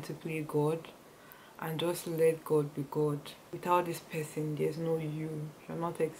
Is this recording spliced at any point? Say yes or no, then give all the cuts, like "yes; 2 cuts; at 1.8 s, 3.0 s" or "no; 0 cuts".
yes; 1 cut; at 3.4 s